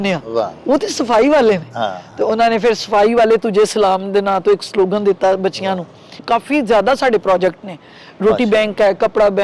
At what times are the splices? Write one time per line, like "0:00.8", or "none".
0:06.1